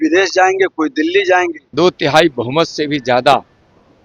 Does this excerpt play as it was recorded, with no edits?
no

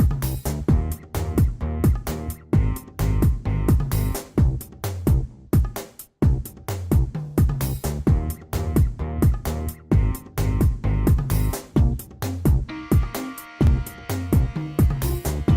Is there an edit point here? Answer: yes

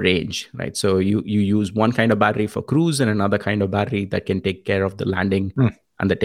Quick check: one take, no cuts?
yes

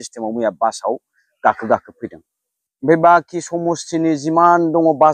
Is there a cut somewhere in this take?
no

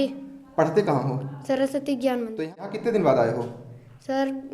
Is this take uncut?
no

